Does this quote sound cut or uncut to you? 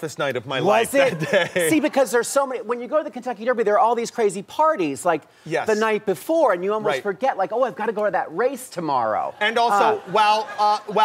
uncut